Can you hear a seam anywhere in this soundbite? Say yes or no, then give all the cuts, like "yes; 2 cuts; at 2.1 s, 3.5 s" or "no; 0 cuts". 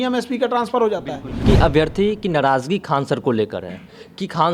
yes; 1 cut; at 1.4 s